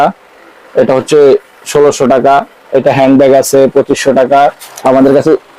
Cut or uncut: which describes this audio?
cut